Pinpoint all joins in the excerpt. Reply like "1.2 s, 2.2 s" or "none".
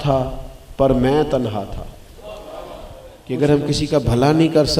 3.1 s

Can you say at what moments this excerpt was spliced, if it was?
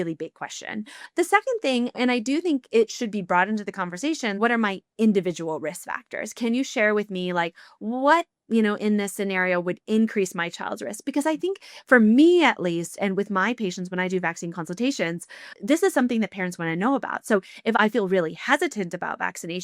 4.4 s

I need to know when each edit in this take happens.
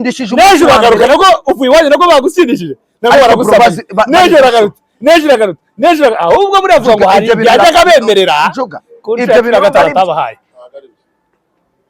none

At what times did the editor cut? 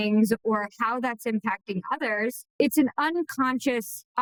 none

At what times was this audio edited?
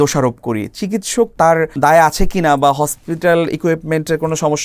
1.6 s

